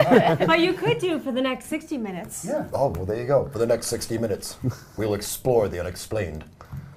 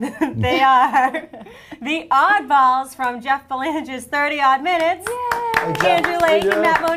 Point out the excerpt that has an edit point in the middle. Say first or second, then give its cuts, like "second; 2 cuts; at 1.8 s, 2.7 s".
first; 1 cut; at 2.3 s